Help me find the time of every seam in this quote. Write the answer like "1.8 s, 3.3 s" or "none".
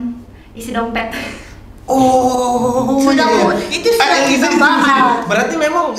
none